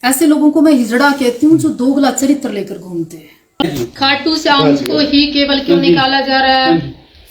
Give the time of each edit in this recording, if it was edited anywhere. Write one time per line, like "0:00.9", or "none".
0:03.6